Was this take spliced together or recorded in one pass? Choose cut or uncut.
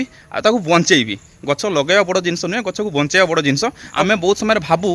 cut